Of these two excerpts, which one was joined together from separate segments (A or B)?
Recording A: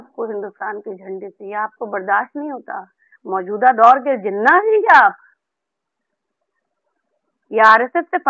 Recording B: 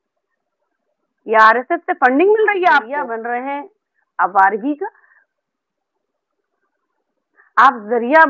B